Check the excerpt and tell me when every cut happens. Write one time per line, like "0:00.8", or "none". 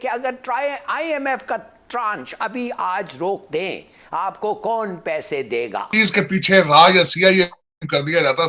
0:05.9